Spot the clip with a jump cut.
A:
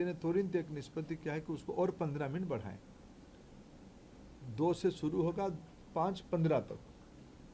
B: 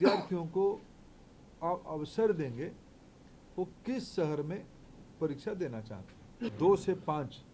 B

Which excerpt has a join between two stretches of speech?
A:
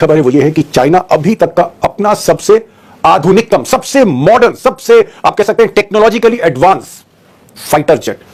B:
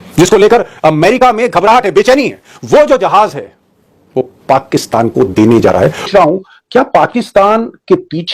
B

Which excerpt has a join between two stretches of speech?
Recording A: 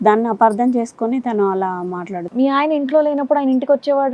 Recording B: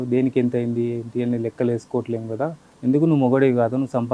B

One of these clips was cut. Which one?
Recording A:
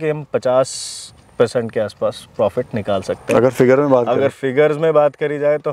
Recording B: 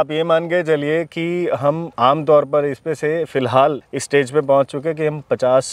B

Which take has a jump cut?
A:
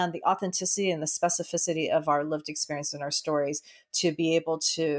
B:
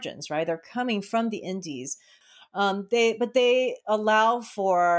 B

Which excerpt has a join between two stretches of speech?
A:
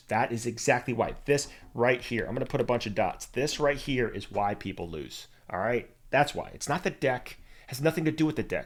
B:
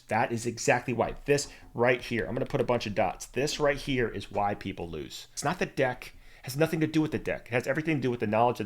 B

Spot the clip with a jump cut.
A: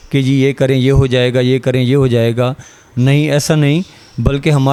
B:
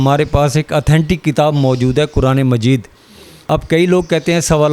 B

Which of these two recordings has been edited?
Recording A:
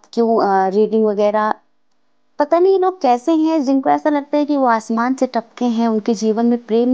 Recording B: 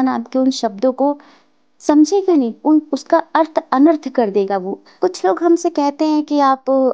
B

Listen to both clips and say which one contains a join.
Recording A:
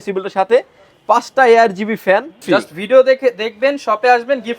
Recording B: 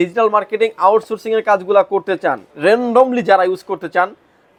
A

